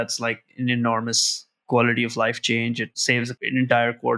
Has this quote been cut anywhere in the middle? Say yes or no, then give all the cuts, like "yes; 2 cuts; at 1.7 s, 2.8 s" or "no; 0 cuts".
yes; 2 cuts; at 1.6 s, 3.2 s